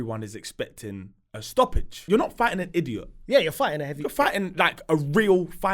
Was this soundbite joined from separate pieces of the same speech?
yes; 1 cut; at 2.0 s

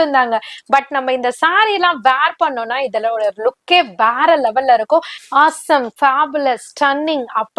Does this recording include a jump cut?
yes; 1 cut; at 5.2 s

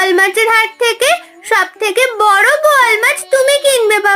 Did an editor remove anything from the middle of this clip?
no; 0 cuts

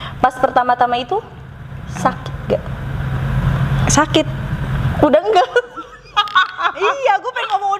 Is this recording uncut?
yes; 0 cuts

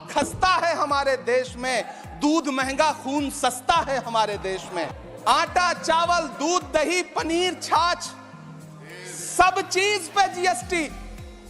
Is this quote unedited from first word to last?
no; 1 cut; at 4.8 s

